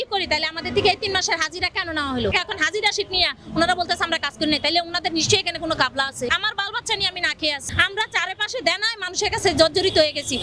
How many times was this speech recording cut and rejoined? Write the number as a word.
three